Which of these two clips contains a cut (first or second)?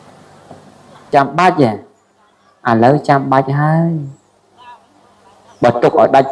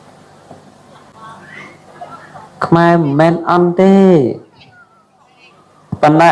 first